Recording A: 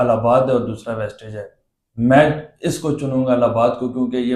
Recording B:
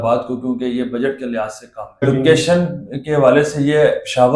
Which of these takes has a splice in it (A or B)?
B